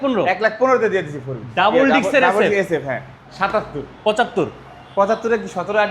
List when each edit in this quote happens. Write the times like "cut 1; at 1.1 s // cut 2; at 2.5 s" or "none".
cut 1; at 3.2 s